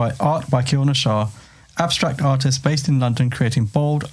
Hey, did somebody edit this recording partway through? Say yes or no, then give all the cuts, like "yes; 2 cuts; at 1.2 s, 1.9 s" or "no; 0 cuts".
no; 0 cuts